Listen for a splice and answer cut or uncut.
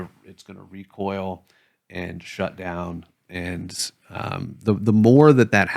uncut